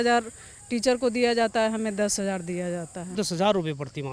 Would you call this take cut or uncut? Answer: cut